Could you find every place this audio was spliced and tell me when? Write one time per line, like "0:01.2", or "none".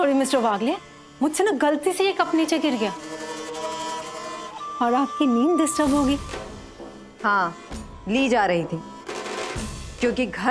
0:06.3